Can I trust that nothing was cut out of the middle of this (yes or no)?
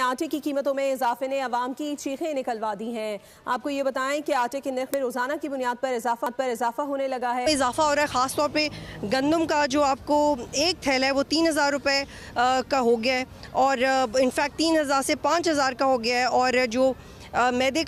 no